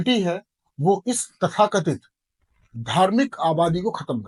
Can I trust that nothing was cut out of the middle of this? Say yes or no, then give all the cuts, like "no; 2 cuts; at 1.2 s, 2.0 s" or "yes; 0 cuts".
yes; 0 cuts